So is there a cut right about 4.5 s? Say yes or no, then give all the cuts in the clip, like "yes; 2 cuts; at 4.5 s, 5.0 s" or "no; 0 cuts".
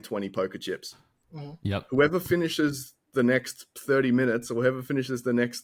no; 0 cuts